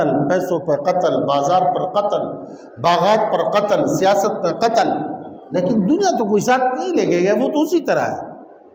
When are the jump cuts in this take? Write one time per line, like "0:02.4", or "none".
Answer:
none

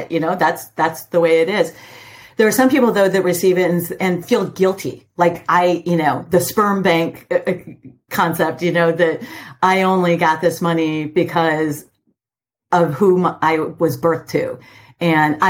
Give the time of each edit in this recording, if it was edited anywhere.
0:04.2

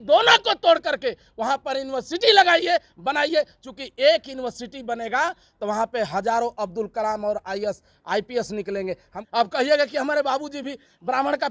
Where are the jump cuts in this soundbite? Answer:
0:09.1

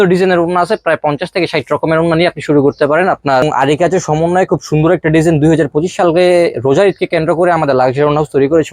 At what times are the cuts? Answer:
0:03.4

